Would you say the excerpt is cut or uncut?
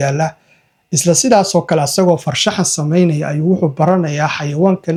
uncut